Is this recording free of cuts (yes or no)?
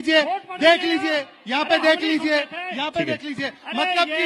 yes